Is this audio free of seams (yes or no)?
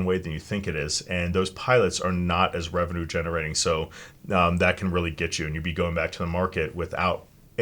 no